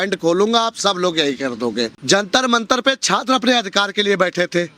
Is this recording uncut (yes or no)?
no